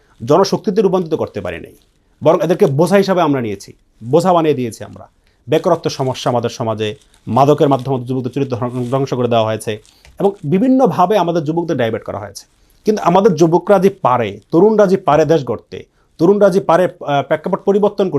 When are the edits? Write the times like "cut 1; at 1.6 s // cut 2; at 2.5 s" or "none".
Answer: none